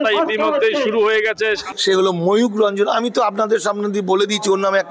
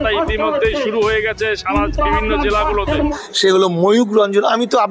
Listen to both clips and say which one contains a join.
first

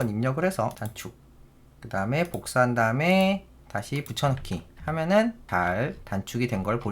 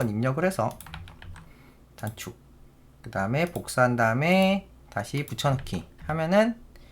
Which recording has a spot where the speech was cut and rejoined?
first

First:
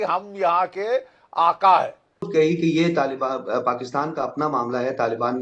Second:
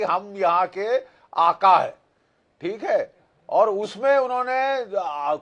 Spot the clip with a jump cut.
first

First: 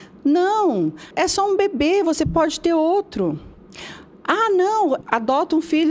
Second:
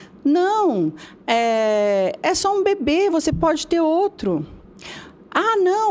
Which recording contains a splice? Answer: first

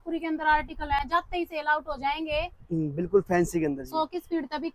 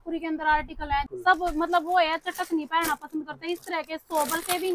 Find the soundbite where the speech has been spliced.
second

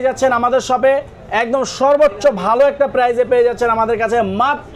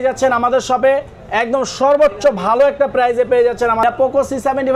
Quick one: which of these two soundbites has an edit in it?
second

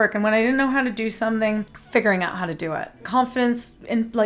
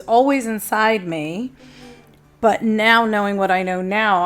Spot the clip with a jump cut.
first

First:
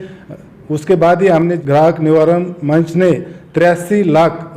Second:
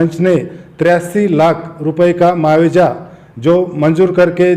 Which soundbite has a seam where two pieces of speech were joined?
first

